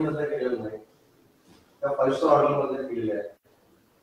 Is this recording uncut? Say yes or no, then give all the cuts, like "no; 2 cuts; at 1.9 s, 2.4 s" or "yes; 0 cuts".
yes; 0 cuts